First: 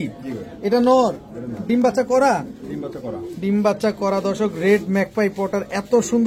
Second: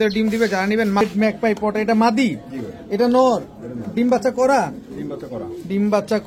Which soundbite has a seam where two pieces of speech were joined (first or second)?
second